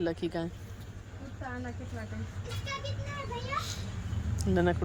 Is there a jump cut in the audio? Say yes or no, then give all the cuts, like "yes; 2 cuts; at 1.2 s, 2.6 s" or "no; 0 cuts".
no; 0 cuts